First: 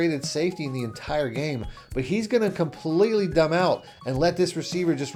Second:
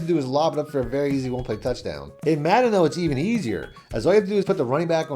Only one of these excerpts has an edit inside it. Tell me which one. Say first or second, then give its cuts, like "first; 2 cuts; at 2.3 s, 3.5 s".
second; 1 cut; at 2.1 s